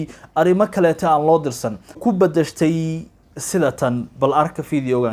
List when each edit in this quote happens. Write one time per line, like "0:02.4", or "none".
0:02.0